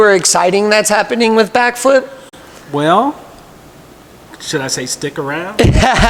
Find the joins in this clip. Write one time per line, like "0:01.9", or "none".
none